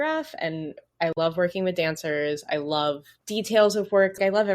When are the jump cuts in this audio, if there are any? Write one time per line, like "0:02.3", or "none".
0:03.1